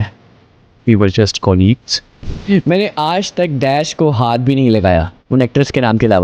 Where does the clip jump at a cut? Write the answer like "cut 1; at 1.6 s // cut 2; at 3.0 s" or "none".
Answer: cut 1; at 2.1 s // cut 2; at 5.2 s